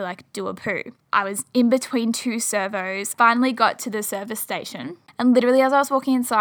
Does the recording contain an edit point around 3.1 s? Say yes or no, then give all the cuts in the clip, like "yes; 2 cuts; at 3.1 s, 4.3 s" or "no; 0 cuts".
yes; 3 cuts; at 1.0 s, 3.1 s, 5.0 s